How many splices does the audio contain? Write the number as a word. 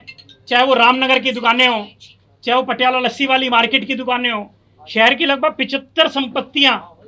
zero